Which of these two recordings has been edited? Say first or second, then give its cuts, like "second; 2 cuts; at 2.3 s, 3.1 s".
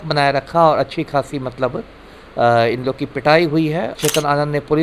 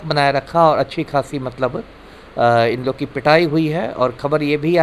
first; 1 cut; at 3.9 s